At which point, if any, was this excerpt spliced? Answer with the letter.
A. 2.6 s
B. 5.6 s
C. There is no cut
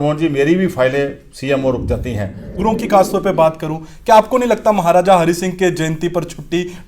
A